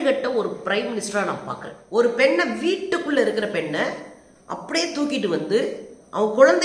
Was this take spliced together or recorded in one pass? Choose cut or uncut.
cut